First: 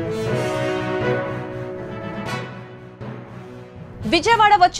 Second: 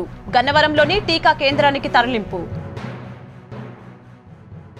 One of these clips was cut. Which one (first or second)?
first